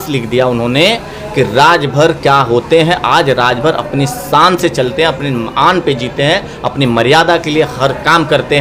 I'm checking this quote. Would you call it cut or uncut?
uncut